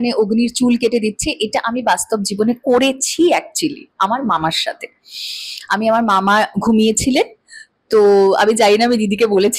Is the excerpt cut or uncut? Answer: uncut